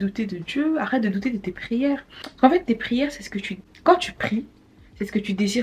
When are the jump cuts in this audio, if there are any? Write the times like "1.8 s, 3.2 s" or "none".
none